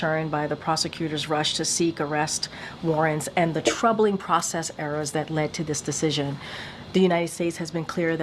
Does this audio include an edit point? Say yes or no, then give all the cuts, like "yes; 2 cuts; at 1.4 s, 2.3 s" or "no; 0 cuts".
no; 0 cuts